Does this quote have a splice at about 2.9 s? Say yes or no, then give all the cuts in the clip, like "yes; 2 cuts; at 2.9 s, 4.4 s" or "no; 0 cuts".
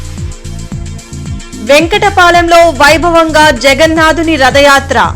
no; 1 cut; at 1.5 s